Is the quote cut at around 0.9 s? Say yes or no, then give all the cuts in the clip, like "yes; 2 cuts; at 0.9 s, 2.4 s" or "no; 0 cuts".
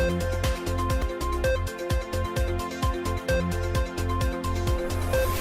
yes; 1 cut; at 0.9 s